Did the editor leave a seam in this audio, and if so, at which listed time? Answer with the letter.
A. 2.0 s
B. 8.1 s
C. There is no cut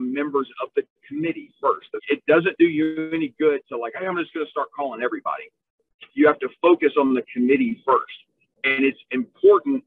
A